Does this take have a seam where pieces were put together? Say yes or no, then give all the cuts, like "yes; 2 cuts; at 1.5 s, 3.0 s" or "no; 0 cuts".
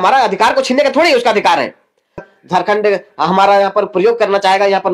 yes; 1 cut; at 2.3 s